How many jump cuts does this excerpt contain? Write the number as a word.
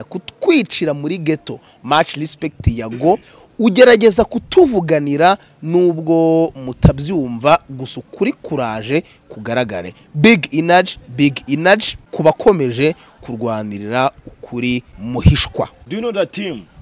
three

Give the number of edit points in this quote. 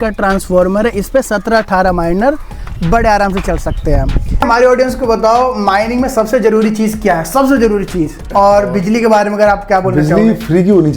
two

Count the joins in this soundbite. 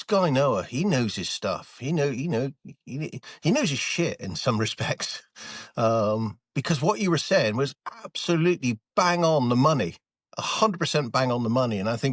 zero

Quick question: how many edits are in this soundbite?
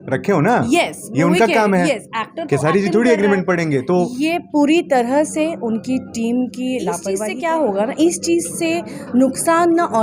one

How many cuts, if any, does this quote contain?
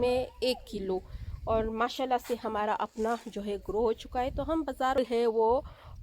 one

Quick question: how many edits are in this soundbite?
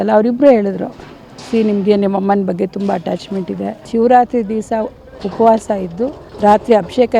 two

